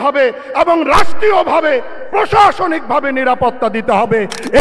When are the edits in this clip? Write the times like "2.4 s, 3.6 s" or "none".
none